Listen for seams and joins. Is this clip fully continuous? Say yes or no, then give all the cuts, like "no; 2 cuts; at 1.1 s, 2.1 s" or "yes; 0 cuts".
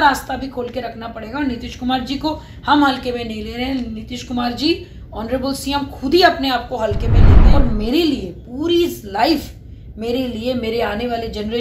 no; 1 cut; at 7.3 s